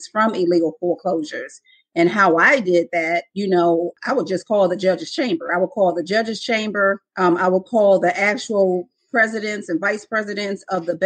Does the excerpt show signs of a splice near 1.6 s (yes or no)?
no